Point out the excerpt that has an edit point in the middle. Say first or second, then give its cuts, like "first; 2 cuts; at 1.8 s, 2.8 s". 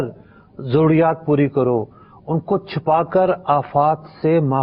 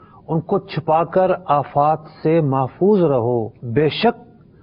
second; 1 cut; at 3.6 s